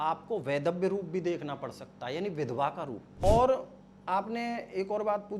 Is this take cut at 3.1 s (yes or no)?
yes